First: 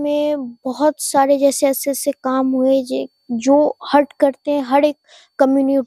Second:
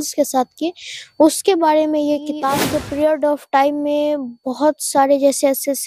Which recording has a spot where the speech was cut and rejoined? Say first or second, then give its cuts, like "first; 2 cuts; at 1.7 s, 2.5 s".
second; 1 cut; at 2.8 s